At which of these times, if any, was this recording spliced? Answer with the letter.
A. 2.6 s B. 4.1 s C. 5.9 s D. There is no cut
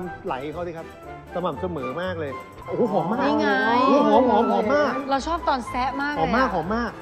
A